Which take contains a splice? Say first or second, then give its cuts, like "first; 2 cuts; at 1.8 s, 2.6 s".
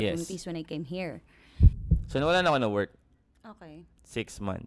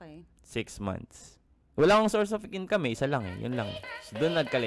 first; 1 cut; at 1.6 s